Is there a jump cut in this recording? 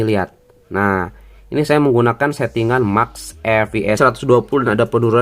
yes; 1 cut; at 4.0 s

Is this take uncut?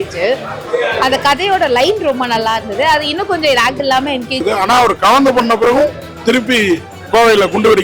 no; 1 cut; at 4.4 s

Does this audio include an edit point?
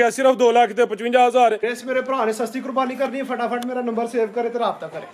yes; 1 cut; at 1.7 s

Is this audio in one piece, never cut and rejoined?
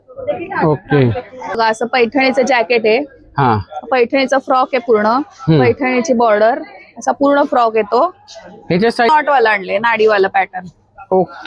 no; 2 cuts; at 1.6 s, 9.1 s

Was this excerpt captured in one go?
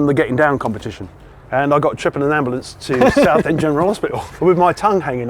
no; 1 cut; at 4.2 s

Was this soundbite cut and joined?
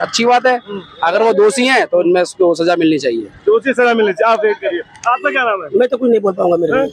no; 0 cuts

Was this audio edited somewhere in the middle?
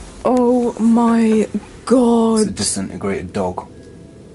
no; 0 cuts

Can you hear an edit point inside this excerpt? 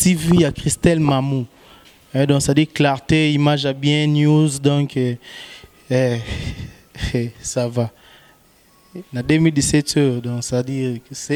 no; 0 cuts

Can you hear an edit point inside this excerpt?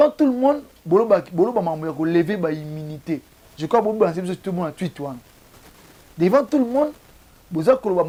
no; 0 cuts

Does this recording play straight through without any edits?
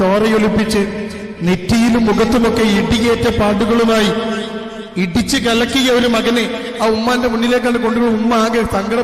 yes; 0 cuts

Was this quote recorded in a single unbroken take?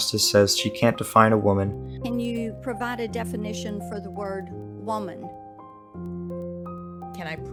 yes; 0 cuts

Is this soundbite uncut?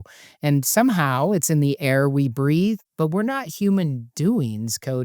no; 1 cut; at 2.9 s

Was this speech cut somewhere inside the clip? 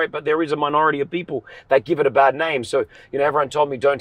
no; 0 cuts

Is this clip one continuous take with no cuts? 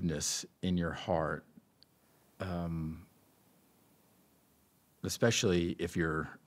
yes; 0 cuts

